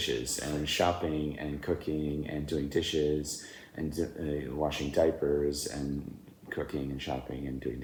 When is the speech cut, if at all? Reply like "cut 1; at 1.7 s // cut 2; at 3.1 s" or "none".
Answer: none